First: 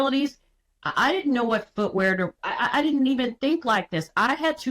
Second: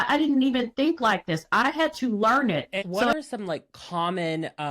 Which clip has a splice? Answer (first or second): second